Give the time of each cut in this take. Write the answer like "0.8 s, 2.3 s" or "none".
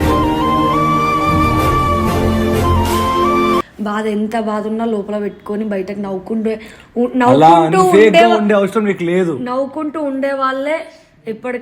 3.7 s